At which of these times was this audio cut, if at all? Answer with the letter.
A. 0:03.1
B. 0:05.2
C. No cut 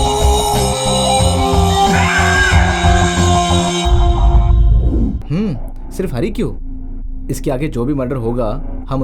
B